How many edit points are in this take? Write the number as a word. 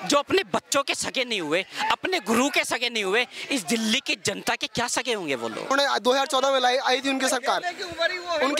one